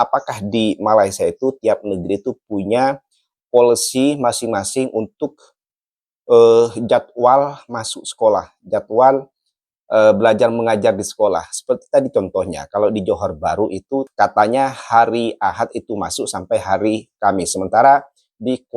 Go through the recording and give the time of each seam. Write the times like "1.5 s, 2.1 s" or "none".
14.1 s